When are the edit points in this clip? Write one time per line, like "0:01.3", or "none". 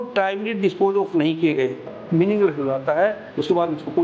0:02.0